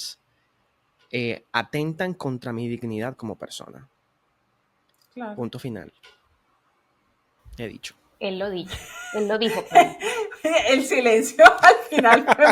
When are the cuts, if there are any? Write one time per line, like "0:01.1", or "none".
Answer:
none